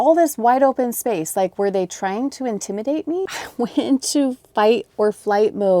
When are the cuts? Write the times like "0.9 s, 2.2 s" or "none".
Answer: 3.3 s